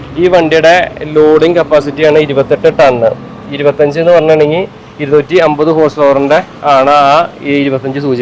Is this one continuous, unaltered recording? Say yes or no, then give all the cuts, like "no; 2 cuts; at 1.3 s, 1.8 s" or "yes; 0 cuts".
yes; 0 cuts